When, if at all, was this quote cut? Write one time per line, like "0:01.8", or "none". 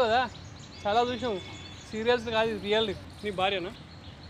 0:03.1